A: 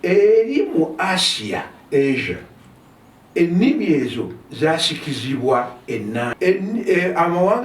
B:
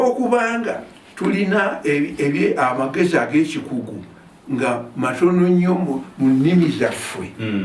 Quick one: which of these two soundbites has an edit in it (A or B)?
A